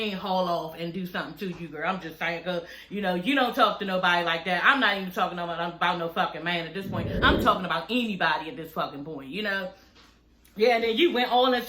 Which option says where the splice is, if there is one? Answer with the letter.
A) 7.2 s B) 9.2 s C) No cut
A